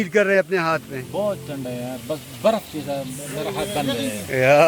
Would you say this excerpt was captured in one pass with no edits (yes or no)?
yes